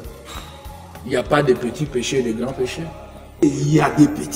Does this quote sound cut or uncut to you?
cut